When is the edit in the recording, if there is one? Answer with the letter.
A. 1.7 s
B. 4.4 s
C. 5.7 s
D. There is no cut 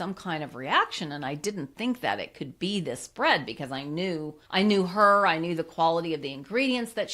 B